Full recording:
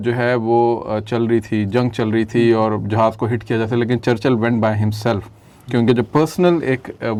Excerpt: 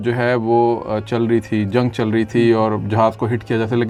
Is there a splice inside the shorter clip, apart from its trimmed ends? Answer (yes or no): no